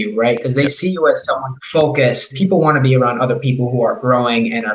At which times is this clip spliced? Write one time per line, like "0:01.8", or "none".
0:01.5
0:02.3